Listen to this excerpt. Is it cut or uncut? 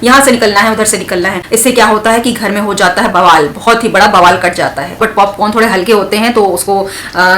cut